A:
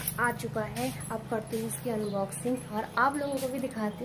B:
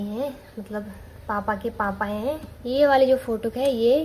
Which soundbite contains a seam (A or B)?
B